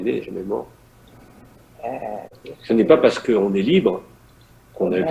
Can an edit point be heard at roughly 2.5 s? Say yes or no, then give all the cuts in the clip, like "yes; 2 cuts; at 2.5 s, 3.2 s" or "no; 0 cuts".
yes; 1 cut; at 2.5 s